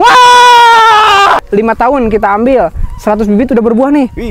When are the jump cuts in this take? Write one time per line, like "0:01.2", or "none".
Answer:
0:01.4